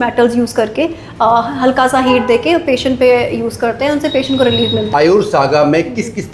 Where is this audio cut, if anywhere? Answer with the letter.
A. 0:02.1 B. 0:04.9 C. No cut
B